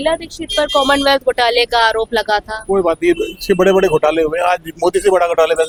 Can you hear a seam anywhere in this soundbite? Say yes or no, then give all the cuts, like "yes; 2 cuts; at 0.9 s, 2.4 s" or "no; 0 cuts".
no; 0 cuts